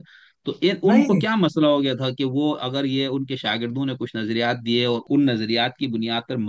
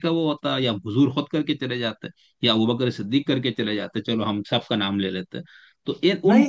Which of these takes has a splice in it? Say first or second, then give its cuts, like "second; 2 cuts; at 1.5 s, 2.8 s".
first; 1 cut; at 5.0 s